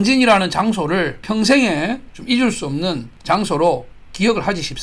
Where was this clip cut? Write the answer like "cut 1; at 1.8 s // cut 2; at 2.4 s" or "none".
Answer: cut 1; at 1.2 s // cut 2; at 3.1 s

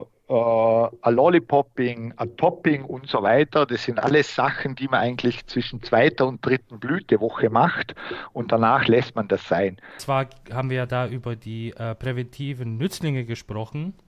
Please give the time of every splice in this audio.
cut 1; at 9.9 s

